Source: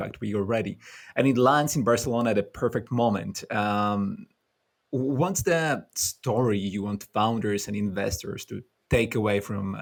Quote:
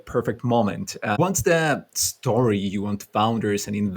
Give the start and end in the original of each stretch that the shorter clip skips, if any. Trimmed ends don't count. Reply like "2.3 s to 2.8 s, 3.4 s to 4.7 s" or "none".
3.6 s to 5.2 s